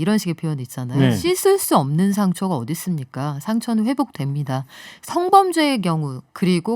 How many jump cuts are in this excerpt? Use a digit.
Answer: 1